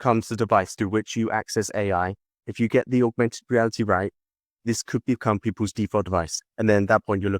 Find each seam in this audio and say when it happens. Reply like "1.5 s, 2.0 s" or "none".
6.4 s